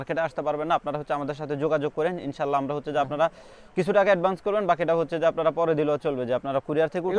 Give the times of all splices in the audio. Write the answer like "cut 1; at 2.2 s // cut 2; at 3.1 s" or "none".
none